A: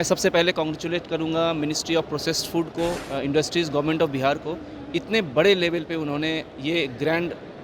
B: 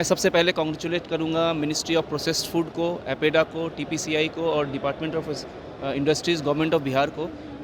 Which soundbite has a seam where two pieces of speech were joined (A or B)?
A